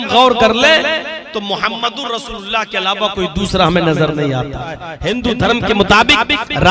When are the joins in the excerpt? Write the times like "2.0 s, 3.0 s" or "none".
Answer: 4.9 s